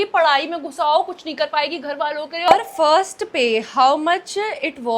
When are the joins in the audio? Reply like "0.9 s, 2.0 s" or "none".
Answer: 2.5 s